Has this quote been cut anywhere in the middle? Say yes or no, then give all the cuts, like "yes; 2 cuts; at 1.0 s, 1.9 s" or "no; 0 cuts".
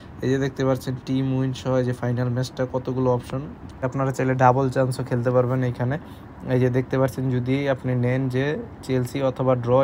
yes; 1 cut; at 3.8 s